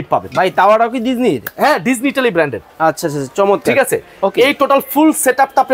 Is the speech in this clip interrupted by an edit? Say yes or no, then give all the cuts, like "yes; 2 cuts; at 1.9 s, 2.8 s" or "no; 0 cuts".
no; 0 cuts